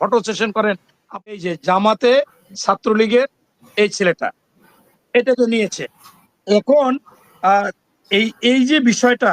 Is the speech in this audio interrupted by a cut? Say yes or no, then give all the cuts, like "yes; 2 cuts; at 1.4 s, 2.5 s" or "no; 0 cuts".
yes; 1 cut; at 1.3 s